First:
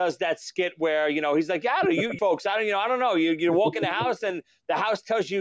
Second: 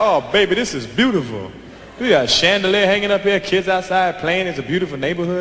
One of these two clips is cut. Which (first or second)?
first